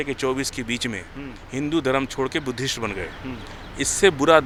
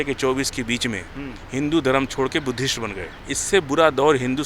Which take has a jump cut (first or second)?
second